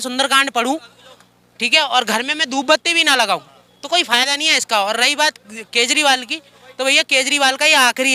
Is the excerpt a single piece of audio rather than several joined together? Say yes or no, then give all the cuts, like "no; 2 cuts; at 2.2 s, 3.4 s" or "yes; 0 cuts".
yes; 0 cuts